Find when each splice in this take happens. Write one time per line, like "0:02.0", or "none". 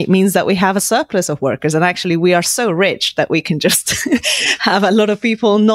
none